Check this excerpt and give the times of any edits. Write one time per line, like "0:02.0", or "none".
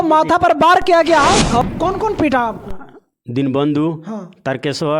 0:01.6